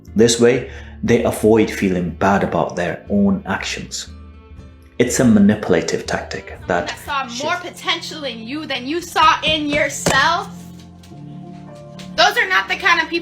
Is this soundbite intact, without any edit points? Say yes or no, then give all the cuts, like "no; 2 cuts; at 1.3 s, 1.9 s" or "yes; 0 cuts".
no; 1 cut; at 7.0 s